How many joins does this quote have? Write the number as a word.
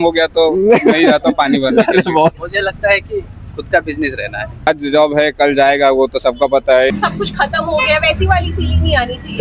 three